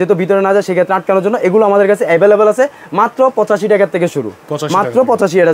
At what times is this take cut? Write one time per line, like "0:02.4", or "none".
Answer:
none